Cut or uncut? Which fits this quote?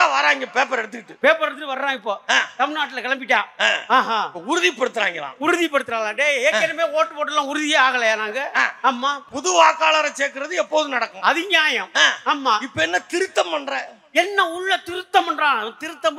cut